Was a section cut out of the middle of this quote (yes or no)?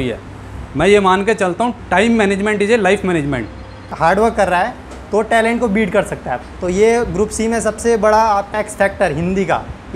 yes